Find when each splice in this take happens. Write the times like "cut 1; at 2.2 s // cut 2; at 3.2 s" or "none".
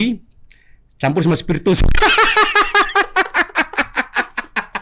none